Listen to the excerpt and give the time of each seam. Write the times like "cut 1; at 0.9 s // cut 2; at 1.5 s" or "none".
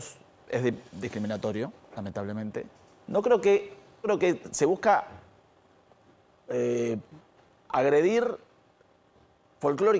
cut 1; at 4.1 s